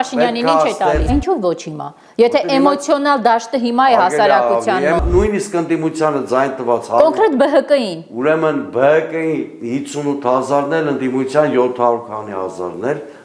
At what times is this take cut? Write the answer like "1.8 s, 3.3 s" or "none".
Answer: 1.1 s, 5.0 s